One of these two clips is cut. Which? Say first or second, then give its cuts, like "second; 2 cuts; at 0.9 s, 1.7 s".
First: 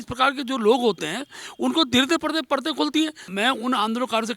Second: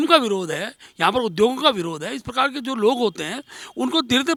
first; 1 cut; at 3.2 s